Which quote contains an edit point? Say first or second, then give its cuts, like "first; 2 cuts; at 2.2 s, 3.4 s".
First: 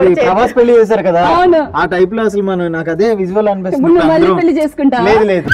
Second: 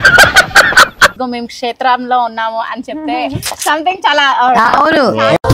second; 1 cut; at 1.1 s